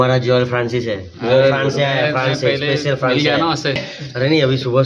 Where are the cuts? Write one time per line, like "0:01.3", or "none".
0:03.9